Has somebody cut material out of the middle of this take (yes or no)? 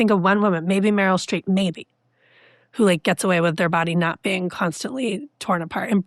no